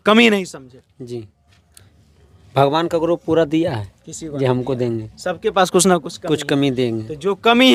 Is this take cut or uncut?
uncut